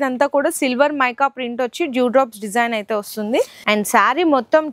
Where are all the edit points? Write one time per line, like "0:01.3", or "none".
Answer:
0:03.6